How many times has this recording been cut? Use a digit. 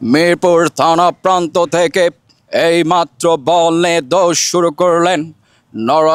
0